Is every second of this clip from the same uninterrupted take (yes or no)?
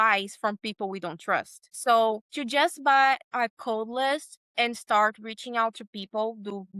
yes